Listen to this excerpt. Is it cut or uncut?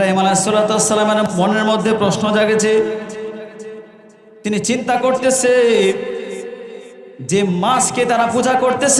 cut